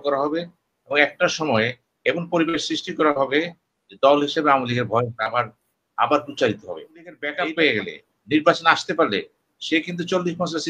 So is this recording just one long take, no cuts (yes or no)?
no